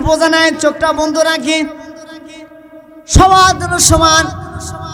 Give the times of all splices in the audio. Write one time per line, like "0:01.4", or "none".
none